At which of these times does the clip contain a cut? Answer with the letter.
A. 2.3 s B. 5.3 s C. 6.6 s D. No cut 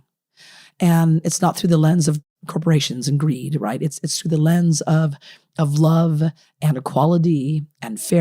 A